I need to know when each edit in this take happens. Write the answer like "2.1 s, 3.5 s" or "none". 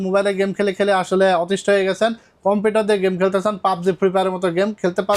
none